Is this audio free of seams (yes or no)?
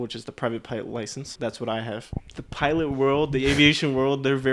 no